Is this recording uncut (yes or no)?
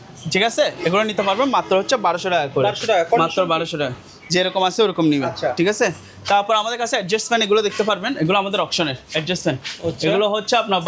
yes